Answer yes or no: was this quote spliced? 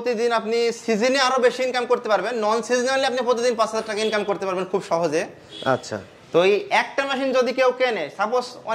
no